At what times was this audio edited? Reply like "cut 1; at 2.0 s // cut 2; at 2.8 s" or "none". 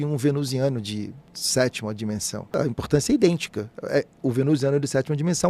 cut 1; at 2.6 s